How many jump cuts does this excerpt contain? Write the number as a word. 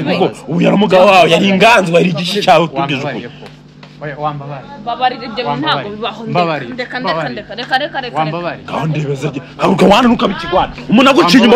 zero